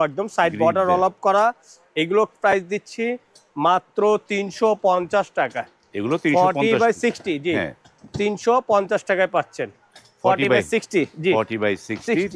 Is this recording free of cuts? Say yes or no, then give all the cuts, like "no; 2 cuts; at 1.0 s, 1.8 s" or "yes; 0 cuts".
yes; 0 cuts